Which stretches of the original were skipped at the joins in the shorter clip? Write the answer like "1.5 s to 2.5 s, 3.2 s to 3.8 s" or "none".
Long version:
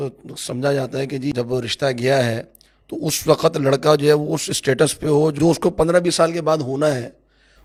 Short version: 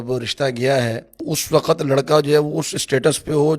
2.5 s to 2.9 s